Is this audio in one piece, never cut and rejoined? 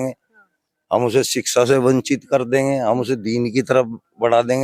yes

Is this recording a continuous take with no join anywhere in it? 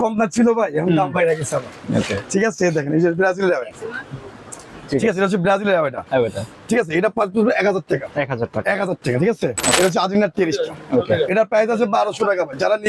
no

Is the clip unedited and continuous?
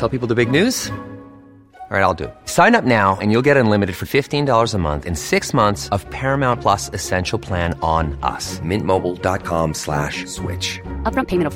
yes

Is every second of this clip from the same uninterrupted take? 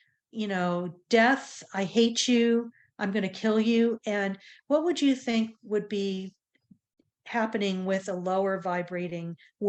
yes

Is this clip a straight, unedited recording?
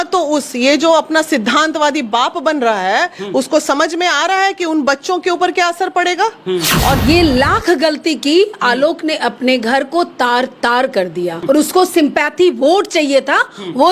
no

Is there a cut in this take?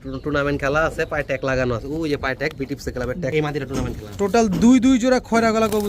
yes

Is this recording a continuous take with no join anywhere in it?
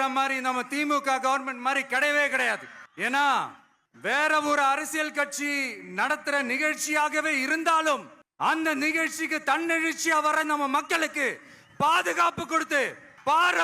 yes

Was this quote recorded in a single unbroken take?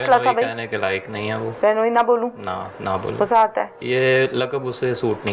no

